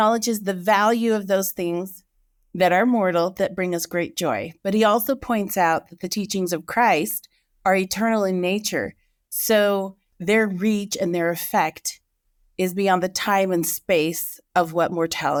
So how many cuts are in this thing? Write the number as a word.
zero